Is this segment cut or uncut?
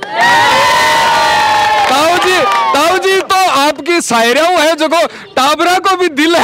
uncut